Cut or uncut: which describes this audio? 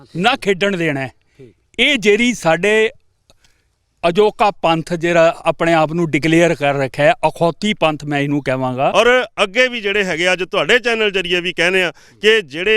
cut